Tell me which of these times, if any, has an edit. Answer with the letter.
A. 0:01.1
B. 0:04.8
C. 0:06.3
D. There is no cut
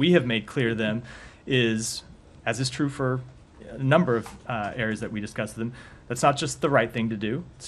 B